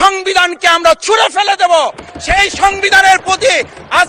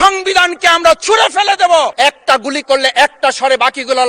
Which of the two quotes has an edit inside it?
second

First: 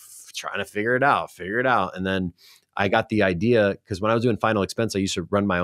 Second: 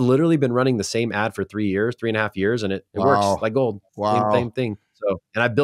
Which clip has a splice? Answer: second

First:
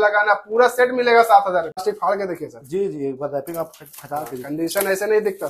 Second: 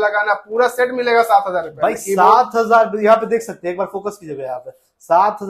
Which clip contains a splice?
first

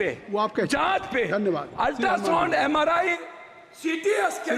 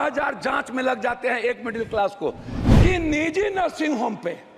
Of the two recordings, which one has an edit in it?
second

